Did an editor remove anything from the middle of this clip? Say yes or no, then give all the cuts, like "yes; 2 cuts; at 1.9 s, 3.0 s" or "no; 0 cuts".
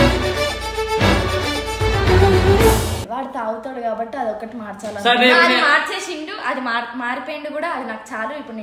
no; 0 cuts